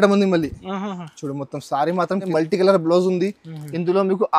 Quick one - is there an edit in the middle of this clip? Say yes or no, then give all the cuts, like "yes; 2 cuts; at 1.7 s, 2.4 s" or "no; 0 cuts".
yes; 1 cut; at 2.2 s